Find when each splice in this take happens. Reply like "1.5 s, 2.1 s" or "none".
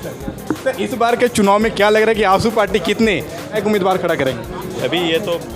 3.5 s